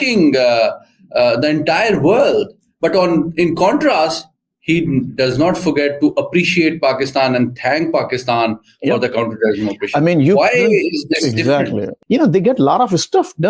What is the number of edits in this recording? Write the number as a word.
one